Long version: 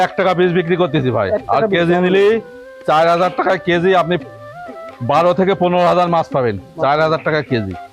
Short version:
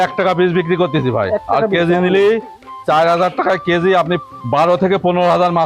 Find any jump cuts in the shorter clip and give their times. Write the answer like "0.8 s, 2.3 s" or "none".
4.3 s